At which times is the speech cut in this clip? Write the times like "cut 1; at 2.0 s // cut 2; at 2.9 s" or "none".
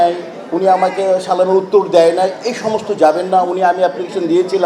none